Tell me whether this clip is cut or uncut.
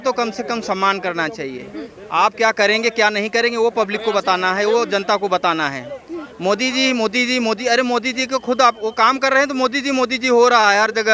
uncut